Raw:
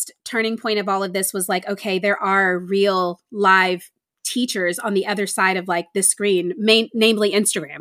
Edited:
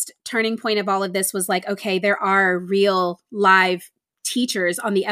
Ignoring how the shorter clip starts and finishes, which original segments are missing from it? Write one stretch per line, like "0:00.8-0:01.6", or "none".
none